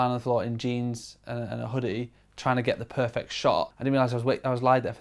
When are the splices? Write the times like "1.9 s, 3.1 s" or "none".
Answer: 3.7 s